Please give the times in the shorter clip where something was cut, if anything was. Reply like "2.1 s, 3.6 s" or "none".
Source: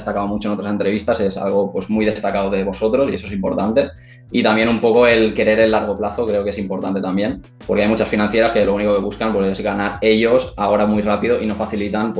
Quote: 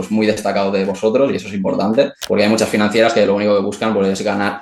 2.2 s